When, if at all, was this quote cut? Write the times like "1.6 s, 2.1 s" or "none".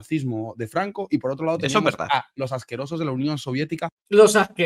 none